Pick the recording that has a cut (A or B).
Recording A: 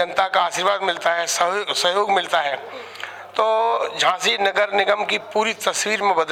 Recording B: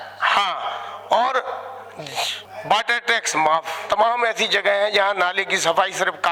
B